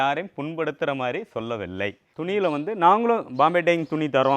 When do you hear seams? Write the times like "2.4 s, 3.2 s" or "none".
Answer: 2.1 s